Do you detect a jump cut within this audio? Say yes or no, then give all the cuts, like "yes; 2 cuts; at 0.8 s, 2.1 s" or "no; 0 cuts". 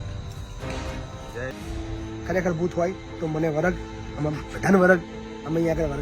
yes; 1 cut; at 1.5 s